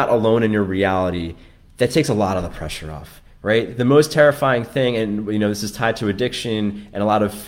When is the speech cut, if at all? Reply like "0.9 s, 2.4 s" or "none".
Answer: none